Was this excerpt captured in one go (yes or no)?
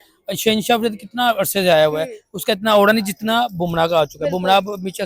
yes